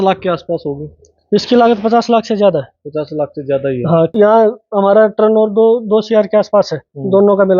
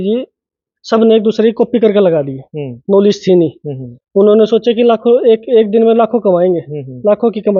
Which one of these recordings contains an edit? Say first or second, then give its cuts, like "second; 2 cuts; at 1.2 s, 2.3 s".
first; 1 cut; at 4.1 s